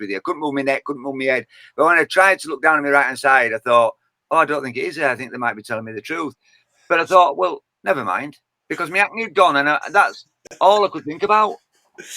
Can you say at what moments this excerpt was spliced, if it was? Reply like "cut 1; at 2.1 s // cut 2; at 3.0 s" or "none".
none